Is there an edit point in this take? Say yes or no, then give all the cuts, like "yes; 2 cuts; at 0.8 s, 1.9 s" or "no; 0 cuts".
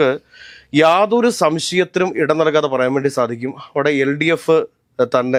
no; 0 cuts